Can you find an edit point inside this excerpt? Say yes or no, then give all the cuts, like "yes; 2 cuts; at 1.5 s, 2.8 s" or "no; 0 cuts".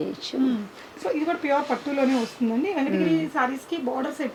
no; 0 cuts